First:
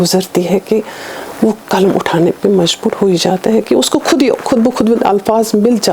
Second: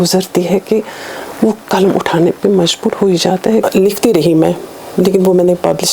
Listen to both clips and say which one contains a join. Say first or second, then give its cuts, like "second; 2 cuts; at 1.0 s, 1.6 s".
second; 1 cut; at 3.6 s